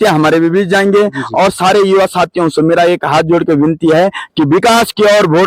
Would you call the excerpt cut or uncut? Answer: uncut